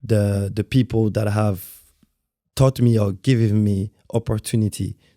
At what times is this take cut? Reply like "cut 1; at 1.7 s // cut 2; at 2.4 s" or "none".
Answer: none

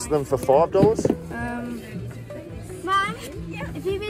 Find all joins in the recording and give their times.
cut 1; at 1.3 s

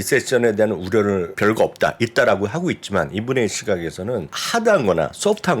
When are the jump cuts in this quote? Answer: cut 1; at 1.3 s // cut 2; at 4.4 s

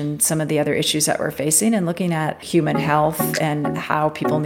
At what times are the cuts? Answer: cut 1; at 2.4 s

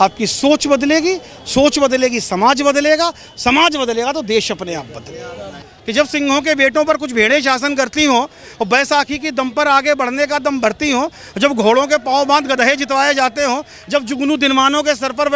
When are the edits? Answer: cut 1; at 5.5 s

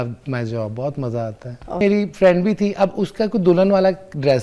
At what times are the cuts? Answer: cut 1; at 1.8 s

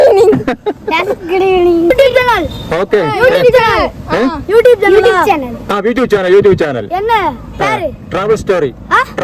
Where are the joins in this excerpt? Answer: cut 1; at 1.9 s

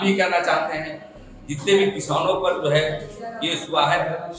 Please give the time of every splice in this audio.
none

